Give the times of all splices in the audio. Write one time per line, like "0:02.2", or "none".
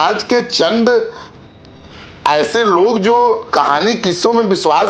0:03.4